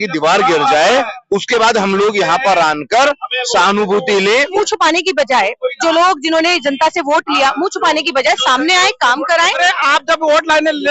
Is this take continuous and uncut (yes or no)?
no